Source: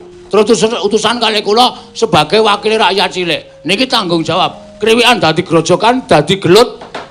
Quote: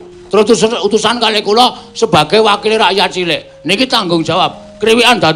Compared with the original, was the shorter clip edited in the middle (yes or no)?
no